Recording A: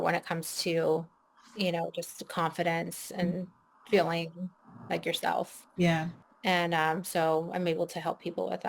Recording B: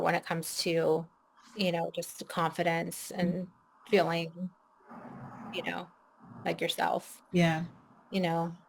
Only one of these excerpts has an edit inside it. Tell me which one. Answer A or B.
A